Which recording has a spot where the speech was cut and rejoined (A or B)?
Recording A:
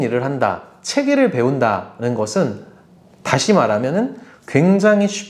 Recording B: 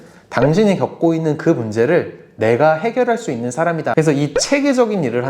B